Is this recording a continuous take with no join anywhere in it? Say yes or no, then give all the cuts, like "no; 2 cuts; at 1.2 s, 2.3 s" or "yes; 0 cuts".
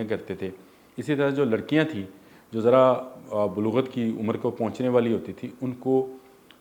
yes; 0 cuts